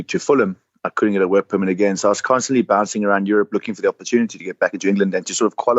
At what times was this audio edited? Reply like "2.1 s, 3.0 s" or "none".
none